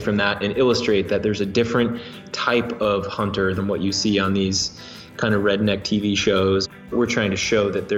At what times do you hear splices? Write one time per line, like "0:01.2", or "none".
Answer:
0:03.5
0:06.9